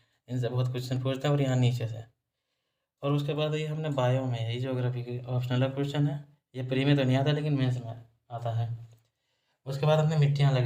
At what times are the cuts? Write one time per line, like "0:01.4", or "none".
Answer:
none